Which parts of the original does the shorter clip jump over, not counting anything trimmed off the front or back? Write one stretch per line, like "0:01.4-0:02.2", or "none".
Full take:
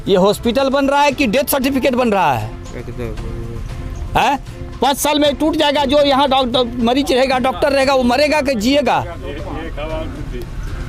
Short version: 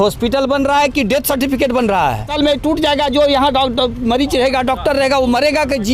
0:02.5-0:05.0